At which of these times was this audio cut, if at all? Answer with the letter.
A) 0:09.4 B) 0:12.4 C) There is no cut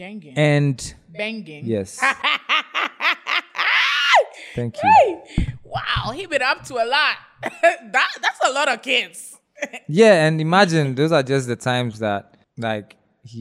B